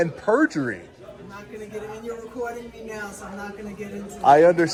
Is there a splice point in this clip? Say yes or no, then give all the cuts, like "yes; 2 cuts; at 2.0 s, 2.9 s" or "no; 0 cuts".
no; 0 cuts